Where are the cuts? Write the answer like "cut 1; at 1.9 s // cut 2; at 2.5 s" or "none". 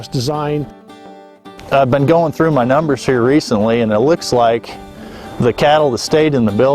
cut 1; at 0.9 s